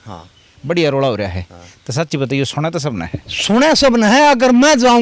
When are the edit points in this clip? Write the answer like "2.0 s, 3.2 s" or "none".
none